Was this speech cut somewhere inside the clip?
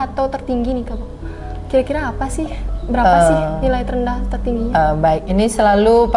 no; 0 cuts

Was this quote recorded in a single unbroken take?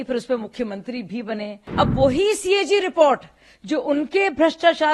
no; 1 cut; at 1.6 s

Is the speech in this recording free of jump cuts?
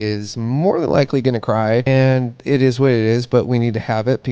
no; 1 cut; at 1.8 s

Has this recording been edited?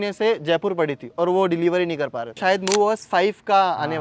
yes; 1 cut; at 2.4 s

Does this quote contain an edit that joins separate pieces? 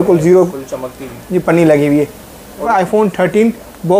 yes; 1 cut; at 2.7 s

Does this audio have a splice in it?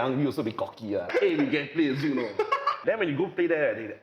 yes; 2 cuts; at 1.1 s, 2.8 s

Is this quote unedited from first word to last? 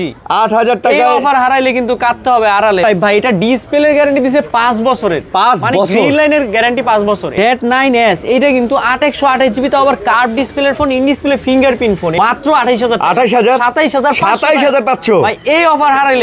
no; 3 cuts; at 2.8 s, 7.3 s, 12.1 s

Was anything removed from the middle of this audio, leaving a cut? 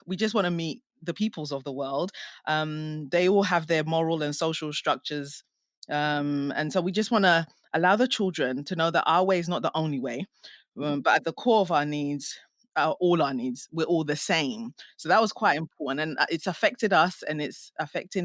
no; 0 cuts

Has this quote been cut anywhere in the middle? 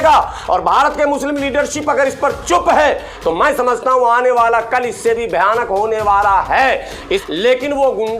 yes; 1 cut; at 7.2 s

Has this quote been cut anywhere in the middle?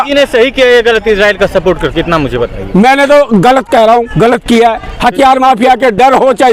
no; 0 cuts

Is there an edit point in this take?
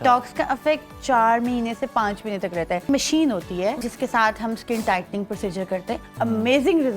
yes; 3 cuts; at 2.9 s, 3.9 s, 6.1 s

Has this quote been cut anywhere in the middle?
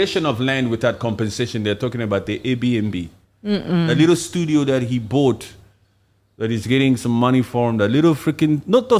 no; 0 cuts

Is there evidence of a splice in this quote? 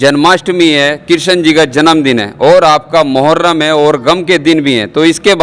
no; 0 cuts

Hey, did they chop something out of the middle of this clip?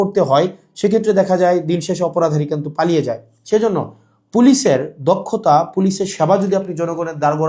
no; 0 cuts

